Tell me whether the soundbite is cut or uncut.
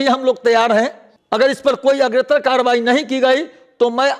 uncut